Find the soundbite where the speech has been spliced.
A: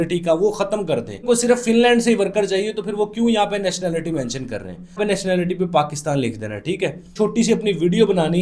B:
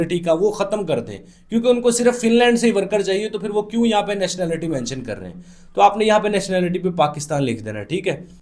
A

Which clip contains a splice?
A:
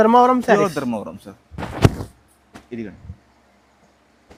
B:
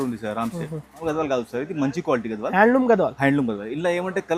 B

